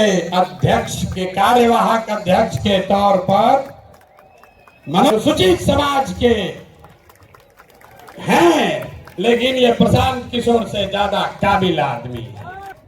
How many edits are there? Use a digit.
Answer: 1